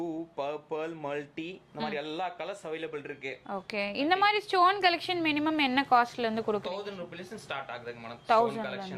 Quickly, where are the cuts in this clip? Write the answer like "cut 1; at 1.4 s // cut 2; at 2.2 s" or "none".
none